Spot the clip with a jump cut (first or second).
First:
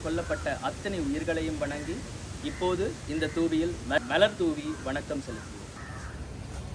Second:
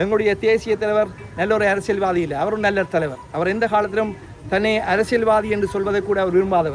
first